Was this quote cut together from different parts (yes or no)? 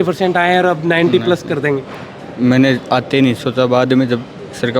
no